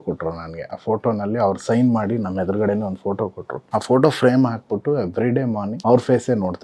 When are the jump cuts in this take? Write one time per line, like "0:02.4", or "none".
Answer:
0:03.5
0:05.7

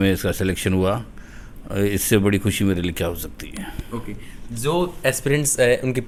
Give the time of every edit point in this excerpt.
none

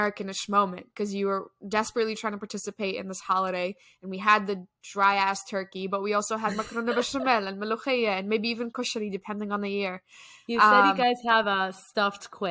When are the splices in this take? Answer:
none

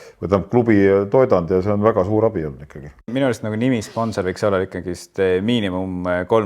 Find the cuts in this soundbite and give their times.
0:03.1

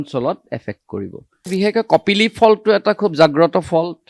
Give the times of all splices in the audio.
0:01.5

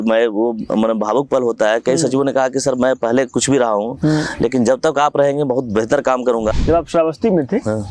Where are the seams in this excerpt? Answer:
0:06.6

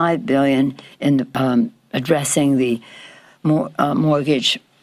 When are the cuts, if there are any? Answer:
0:01.3

